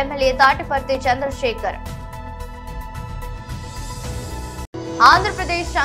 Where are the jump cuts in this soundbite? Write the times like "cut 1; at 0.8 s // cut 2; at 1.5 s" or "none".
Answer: none